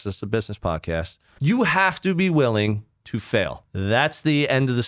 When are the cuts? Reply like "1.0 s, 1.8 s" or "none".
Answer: 1.2 s, 3.7 s